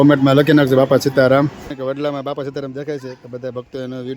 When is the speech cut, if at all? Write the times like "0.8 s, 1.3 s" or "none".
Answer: 1.7 s